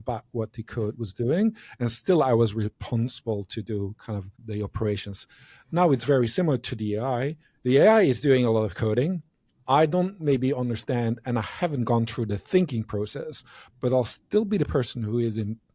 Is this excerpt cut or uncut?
cut